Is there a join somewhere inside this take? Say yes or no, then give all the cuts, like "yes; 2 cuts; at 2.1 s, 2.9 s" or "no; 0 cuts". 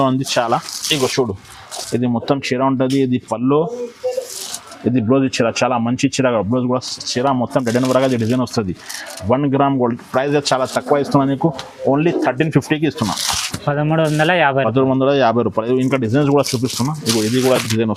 no; 0 cuts